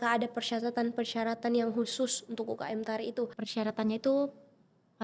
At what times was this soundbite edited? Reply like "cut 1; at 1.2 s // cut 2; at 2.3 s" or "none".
cut 1; at 3.4 s